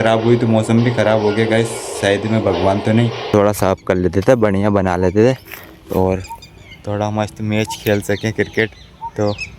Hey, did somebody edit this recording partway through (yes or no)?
yes